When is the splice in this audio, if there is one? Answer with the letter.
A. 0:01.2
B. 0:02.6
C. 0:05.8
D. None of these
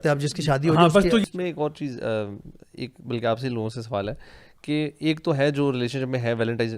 A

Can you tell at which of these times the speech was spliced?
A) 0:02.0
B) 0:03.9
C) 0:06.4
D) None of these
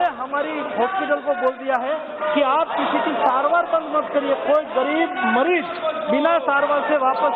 D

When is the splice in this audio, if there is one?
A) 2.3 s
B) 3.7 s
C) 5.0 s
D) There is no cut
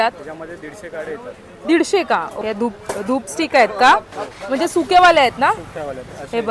A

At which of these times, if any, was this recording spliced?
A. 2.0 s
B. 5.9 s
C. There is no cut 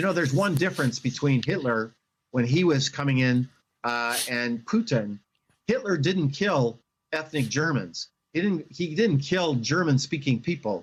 C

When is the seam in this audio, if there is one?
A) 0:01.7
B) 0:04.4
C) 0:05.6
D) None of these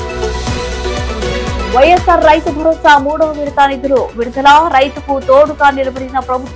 A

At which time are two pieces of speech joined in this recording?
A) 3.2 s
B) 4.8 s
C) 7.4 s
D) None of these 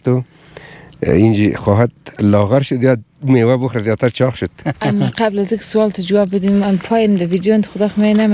D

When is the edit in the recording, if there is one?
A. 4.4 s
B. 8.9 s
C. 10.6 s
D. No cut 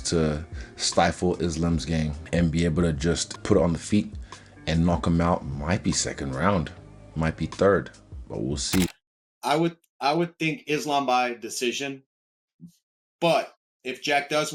B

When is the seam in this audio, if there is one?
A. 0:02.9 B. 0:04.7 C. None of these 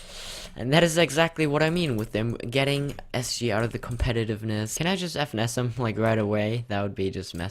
B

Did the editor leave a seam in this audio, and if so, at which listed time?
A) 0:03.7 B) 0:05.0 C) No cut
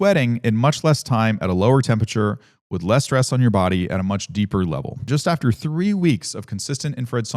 B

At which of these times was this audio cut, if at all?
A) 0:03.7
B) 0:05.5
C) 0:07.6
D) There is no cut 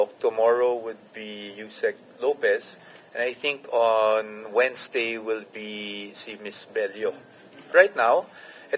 C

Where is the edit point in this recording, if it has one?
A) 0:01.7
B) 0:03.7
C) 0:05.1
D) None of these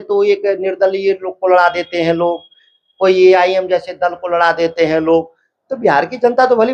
D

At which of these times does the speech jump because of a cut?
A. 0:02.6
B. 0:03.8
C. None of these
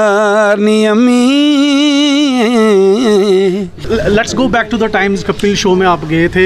B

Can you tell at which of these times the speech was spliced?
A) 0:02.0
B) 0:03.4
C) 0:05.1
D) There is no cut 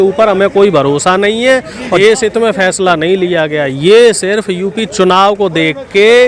A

